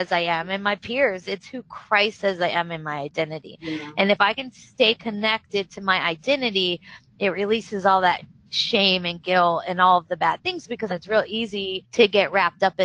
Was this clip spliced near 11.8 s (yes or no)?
yes